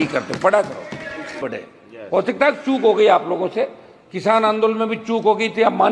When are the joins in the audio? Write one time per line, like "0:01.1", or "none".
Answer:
0:01.4